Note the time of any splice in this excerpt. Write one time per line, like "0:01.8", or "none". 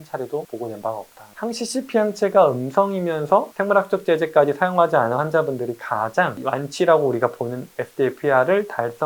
0:01.3